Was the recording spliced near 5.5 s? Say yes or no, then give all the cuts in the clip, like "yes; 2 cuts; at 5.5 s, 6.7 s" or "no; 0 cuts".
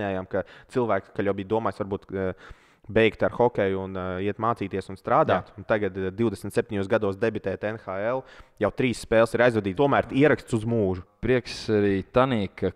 no; 3 cuts; at 1.1 s, 9.7 s, 11.1 s